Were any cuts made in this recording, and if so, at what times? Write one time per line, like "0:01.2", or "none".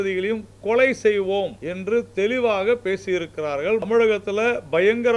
0:01.6
0:03.8